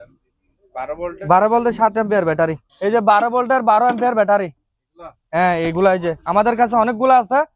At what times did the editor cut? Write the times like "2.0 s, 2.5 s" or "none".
2.7 s